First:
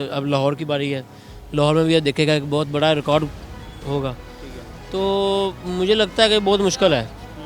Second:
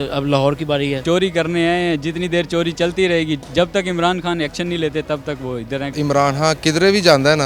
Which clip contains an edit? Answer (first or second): second